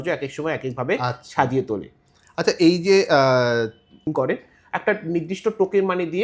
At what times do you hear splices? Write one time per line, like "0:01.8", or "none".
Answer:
0:04.1

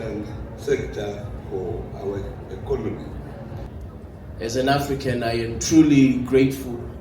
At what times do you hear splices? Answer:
0:03.7

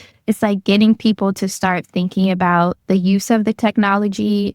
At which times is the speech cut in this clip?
0:02.8

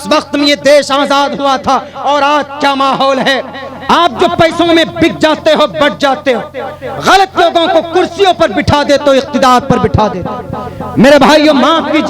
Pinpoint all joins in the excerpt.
0:03.7

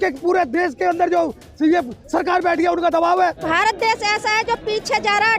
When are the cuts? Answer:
0:03.4

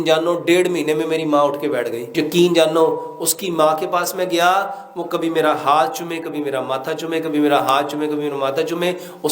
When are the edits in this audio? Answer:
0:02.0

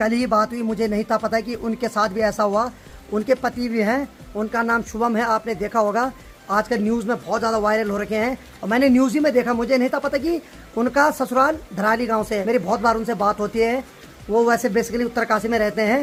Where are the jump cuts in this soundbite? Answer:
none

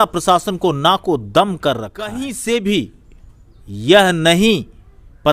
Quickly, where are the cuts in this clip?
0:02.3

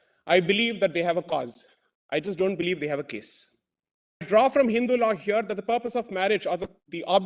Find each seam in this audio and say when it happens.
0:04.3

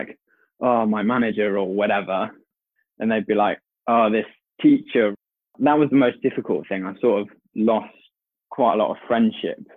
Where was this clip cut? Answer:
0:05.1

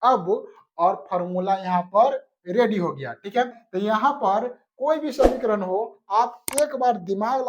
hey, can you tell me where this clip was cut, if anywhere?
0:03.6

